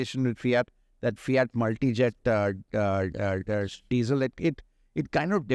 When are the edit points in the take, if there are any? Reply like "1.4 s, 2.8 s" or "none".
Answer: none